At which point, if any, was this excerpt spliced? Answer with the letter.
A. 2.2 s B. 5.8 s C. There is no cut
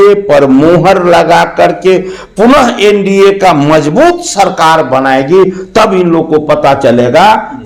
C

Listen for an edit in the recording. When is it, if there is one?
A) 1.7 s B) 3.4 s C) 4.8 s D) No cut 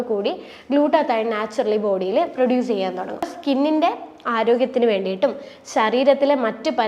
B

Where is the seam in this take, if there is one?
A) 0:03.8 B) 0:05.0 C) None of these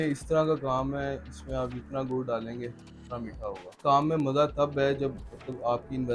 A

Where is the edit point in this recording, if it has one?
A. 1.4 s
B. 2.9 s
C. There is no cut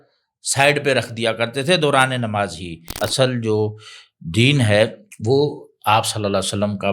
B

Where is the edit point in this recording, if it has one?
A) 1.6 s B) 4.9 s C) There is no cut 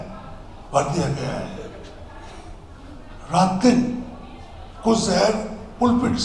C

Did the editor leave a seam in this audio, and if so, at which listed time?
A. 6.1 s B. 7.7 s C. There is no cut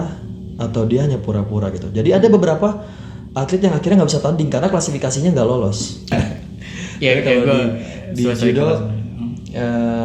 A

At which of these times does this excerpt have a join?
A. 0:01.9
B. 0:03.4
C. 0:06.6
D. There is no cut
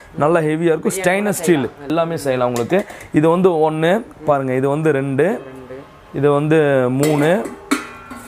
A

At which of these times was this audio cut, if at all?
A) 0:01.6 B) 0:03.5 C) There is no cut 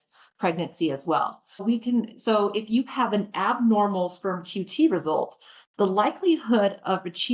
A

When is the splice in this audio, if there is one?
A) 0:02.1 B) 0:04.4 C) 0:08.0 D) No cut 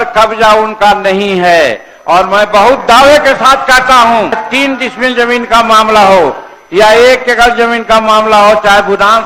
B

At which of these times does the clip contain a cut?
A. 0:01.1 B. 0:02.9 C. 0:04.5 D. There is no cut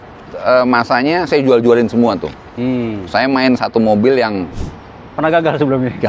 C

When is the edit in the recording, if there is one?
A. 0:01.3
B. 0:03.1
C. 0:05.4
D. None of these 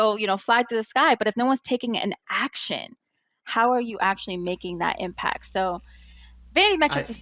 D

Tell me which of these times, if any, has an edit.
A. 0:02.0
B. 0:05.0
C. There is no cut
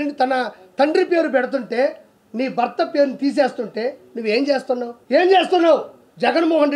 B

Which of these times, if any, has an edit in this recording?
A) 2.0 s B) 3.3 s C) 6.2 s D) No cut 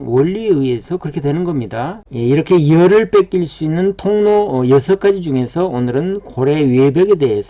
A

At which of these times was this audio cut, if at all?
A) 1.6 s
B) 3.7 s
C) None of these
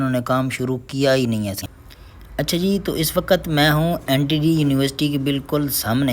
A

